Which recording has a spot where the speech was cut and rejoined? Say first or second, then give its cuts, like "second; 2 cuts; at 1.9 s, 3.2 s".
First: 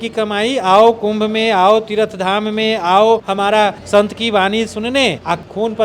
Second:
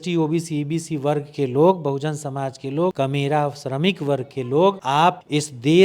second; 2 cuts; at 2.9 s, 4.8 s